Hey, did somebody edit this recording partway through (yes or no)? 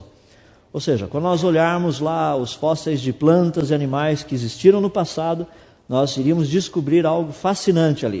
no